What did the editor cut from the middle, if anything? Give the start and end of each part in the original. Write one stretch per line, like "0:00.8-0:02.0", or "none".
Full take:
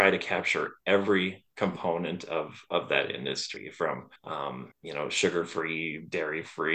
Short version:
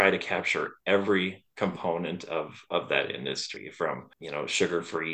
0:04.1-0:04.8